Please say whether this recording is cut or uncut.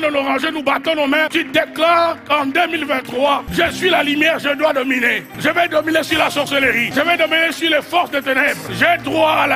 cut